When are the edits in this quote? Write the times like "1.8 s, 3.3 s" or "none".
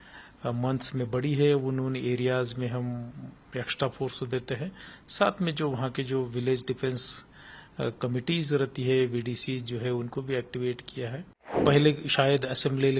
11.5 s